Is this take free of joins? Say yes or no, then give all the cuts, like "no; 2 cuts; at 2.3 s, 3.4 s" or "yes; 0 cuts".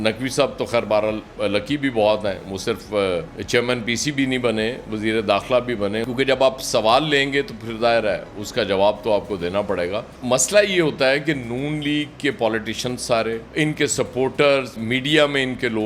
no; 2 cuts; at 6.1 s, 10.1 s